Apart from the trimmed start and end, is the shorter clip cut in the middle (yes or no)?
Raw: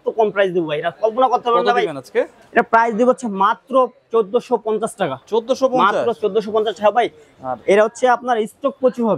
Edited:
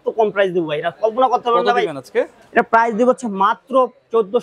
no